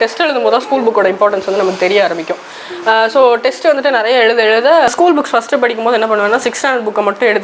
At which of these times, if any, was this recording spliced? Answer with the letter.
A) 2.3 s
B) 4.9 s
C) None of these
B